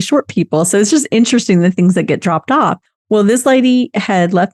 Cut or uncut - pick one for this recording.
uncut